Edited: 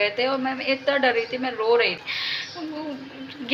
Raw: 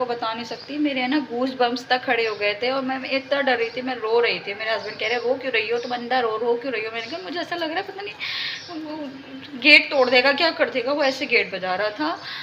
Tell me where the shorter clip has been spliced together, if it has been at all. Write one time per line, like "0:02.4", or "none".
0:02.1